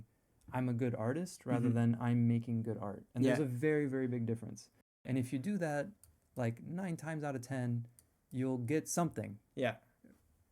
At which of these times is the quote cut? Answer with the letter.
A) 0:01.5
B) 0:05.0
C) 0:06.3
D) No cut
B